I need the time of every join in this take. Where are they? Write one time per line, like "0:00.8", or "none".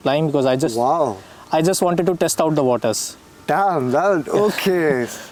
none